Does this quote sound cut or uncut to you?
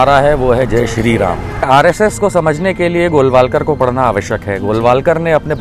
cut